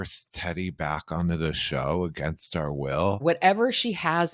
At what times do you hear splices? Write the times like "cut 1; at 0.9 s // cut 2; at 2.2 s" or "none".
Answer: cut 1; at 3.2 s